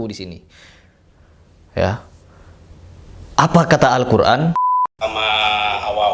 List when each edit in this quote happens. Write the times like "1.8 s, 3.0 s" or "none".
4.5 s